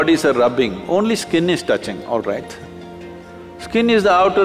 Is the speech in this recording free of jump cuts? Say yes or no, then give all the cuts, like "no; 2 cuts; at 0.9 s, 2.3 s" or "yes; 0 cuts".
yes; 0 cuts